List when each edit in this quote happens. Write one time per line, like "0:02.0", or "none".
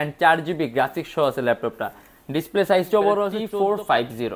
0:03.5